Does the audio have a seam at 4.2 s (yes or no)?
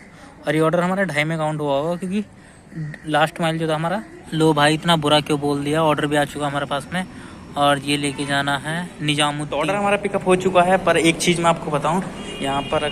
yes